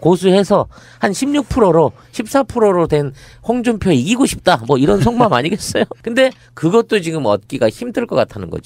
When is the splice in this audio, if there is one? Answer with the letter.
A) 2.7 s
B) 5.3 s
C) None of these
B